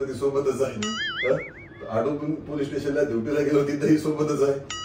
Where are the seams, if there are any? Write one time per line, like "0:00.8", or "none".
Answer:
none